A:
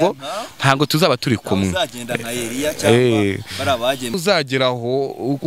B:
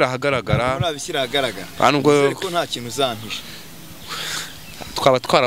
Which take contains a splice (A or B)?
A